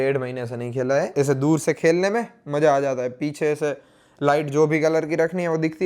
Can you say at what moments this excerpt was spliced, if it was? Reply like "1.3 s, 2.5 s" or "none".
1.1 s